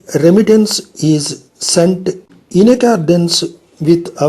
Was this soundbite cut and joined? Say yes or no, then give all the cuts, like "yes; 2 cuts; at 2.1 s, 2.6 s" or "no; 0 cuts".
yes; 1 cut; at 2.3 s